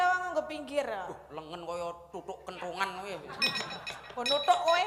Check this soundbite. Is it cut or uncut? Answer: uncut